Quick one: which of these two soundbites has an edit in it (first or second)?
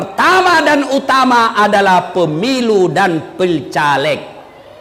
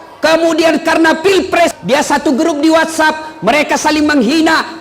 second